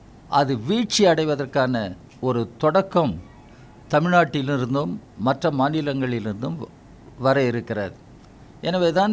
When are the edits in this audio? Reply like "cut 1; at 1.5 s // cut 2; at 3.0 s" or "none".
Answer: none